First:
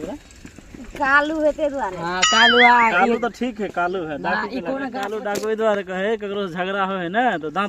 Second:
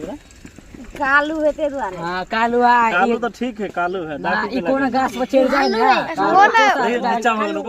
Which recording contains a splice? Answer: first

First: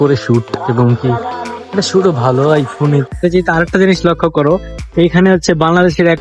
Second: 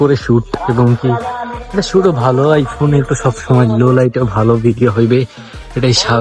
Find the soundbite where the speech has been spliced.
first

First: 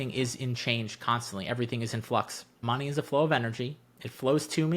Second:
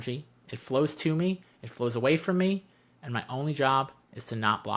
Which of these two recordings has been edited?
first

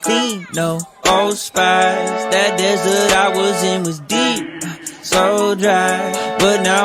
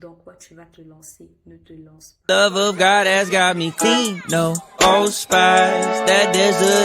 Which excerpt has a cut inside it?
second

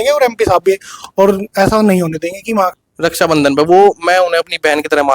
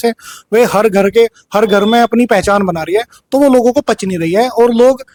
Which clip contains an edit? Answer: first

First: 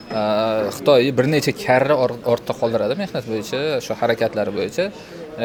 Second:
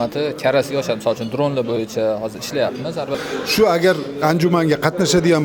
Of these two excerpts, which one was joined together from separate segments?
second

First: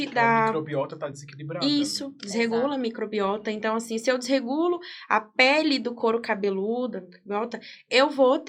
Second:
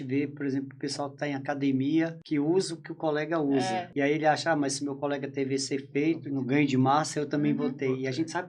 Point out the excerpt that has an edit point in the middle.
second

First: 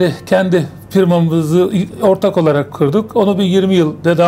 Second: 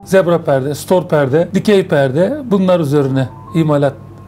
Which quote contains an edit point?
second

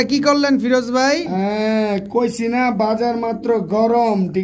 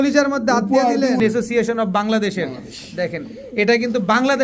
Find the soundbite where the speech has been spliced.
second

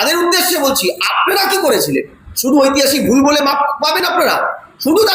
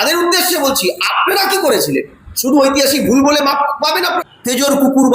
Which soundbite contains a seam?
second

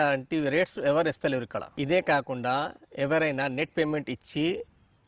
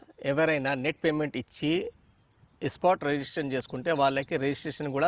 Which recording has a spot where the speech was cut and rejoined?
first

